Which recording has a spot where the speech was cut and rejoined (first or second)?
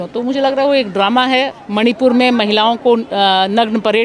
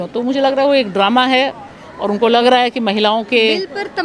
first